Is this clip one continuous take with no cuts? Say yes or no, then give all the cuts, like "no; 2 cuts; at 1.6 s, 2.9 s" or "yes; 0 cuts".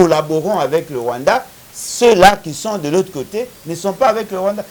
yes; 0 cuts